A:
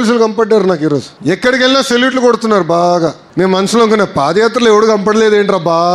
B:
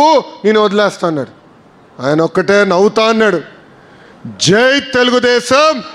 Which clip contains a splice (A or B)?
A